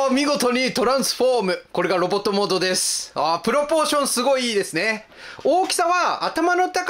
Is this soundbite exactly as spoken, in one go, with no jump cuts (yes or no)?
yes